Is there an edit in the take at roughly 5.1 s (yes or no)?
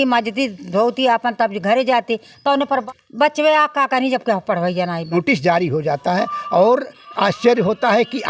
yes